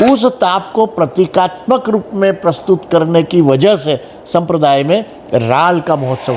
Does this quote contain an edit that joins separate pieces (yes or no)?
no